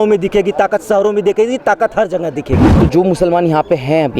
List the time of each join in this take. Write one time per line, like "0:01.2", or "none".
0:02.7